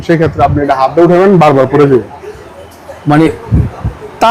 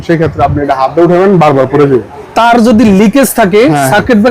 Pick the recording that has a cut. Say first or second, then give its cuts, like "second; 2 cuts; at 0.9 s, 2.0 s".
second; 1 cut; at 2.2 s